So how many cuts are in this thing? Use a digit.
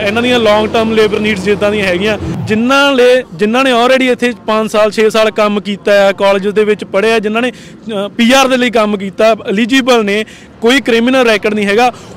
1